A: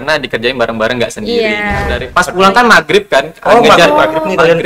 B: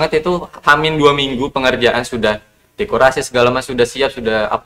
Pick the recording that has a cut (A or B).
A